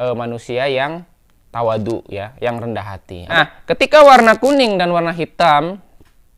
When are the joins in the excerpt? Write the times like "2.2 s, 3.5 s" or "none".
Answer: 3.4 s